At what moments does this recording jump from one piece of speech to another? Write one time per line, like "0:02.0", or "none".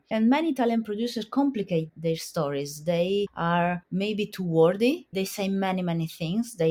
none